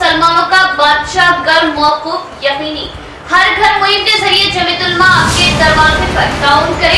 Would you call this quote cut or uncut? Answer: uncut